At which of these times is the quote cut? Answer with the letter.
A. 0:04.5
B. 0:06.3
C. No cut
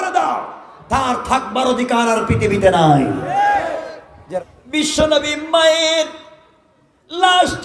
A